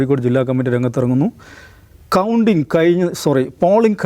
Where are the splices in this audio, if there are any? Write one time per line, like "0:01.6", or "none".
none